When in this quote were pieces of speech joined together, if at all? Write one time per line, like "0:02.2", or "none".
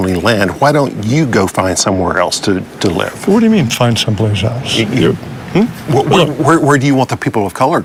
none